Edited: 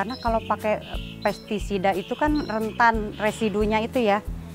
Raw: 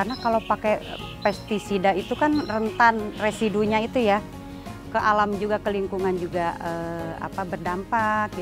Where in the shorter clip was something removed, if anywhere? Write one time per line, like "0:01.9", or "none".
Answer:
none